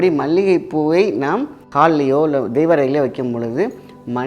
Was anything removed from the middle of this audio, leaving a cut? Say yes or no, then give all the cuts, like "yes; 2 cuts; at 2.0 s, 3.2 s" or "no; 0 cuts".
yes; 1 cut; at 1.6 s